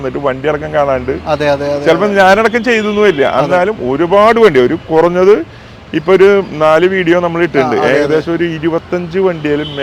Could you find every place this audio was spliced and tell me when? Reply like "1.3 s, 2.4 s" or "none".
none